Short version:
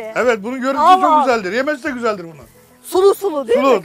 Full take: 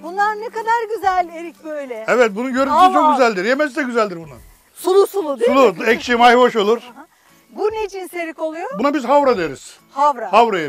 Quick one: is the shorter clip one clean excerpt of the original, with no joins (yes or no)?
yes